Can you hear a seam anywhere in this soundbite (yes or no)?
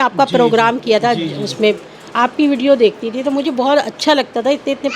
yes